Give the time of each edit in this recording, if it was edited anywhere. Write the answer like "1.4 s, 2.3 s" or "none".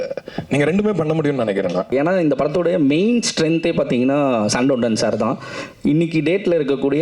1.9 s